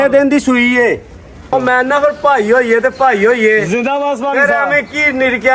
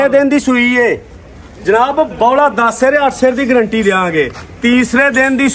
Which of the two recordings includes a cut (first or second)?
first